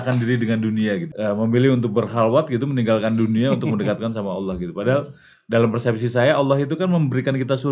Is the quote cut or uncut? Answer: cut